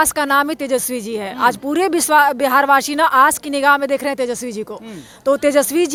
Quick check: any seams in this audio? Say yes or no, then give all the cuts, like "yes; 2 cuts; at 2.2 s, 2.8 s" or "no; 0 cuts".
no; 0 cuts